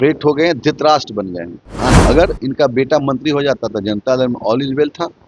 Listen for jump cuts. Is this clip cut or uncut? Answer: cut